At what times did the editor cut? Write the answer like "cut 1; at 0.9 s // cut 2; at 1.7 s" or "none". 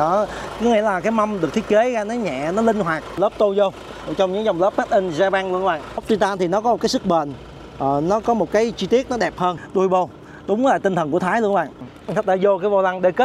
cut 1; at 3.2 s // cut 2; at 6.0 s // cut 3; at 9.6 s // cut 4; at 11.8 s